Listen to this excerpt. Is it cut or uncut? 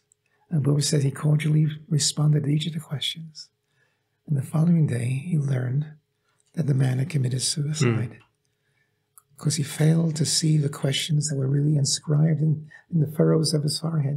uncut